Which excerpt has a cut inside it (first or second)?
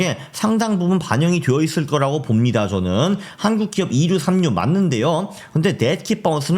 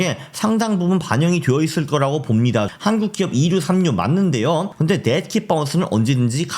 second